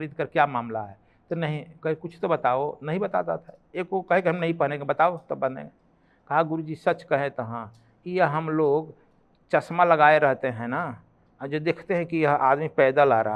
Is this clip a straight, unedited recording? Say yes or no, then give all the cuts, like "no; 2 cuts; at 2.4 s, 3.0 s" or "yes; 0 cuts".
yes; 0 cuts